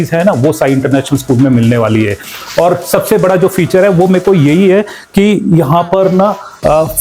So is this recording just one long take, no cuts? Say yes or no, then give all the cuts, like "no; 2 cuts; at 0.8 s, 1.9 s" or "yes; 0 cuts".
yes; 0 cuts